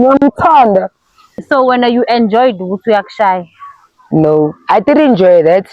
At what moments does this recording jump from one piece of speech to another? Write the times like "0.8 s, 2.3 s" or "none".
1.3 s